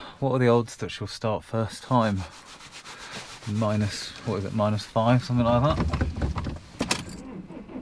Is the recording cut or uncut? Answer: uncut